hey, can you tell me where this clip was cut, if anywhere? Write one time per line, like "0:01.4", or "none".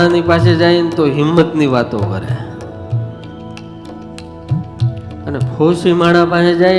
none